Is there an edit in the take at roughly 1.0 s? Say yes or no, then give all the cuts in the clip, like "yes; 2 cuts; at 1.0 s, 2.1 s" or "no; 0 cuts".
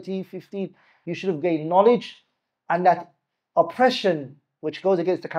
no; 0 cuts